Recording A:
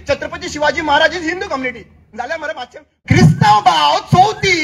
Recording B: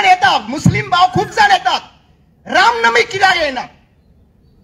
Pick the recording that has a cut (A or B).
A